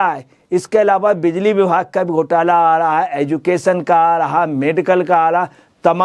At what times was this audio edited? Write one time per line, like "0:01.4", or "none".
none